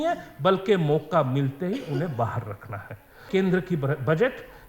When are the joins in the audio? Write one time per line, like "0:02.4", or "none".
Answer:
0:03.2